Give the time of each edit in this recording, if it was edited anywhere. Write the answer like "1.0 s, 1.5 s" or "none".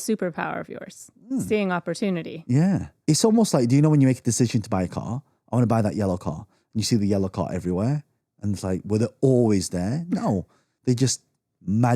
2.9 s